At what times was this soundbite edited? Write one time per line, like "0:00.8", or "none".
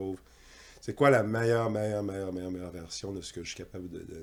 none